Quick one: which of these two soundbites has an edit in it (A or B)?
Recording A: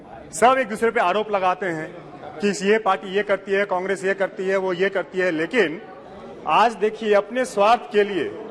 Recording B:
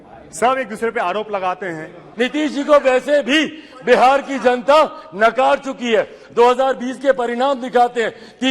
B